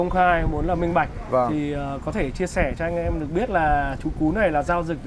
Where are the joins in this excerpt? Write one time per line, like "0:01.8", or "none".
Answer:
none